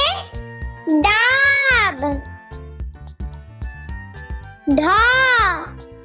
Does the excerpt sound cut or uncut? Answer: uncut